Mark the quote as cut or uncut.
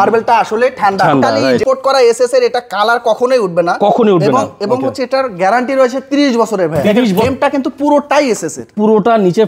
cut